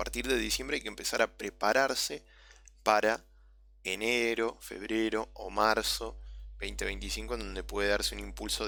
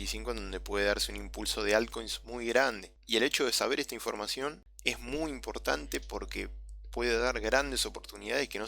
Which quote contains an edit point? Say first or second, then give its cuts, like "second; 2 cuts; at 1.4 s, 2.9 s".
second; 2 cuts; at 2.9 s, 4.7 s